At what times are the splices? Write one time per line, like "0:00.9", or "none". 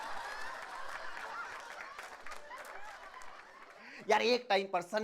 none